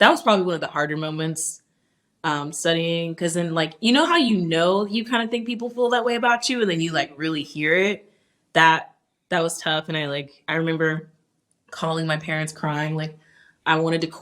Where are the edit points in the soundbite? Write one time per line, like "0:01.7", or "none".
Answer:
none